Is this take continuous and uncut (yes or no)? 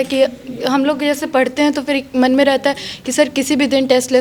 yes